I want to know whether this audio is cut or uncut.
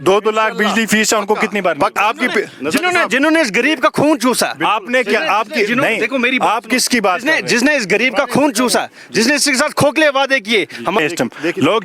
cut